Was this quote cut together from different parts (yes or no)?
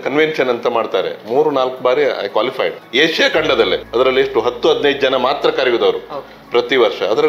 yes